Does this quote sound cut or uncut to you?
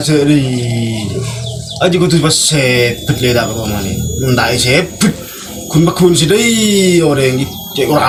uncut